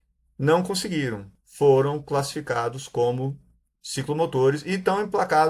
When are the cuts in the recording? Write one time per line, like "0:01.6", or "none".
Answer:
0:01.3